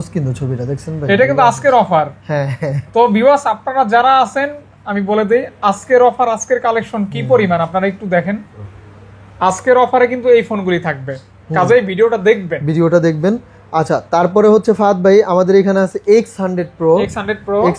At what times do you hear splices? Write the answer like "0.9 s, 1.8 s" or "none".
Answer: none

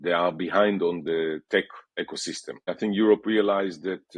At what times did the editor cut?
2.7 s

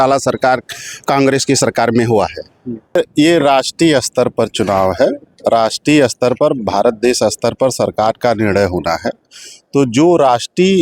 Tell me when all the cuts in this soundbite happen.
3.0 s

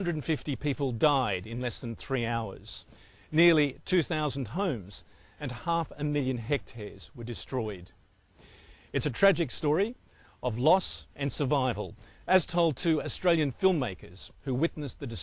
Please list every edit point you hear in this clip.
13.9 s

